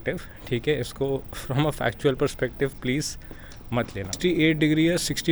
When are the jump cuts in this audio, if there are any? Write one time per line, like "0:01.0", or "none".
0:04.1